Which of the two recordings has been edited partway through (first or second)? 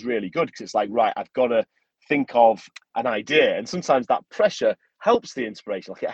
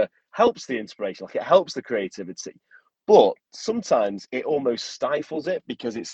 first